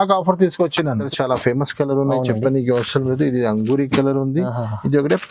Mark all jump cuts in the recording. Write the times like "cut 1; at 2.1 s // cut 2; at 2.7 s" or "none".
cut 1; at 1.1 s